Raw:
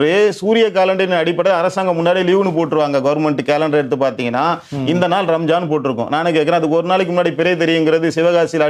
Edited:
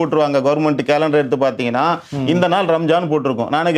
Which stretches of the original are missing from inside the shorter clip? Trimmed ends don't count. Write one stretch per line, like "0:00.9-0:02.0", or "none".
none